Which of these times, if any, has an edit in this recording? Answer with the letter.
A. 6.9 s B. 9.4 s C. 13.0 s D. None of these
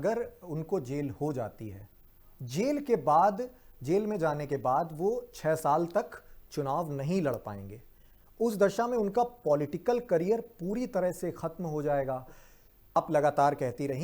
C